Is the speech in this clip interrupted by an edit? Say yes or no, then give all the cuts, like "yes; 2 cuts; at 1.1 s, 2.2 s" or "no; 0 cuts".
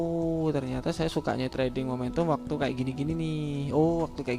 yes; 1 cut; at 1.5 s